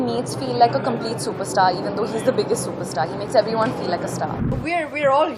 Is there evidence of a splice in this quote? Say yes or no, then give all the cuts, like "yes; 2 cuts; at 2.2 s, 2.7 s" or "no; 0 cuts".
yes; 1 cut; at 4.5 s